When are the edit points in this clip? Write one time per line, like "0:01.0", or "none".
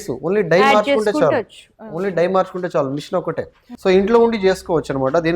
0:03.7